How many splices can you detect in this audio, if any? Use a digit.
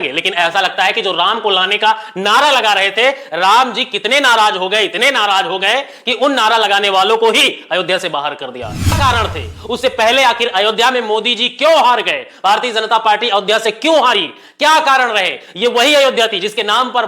1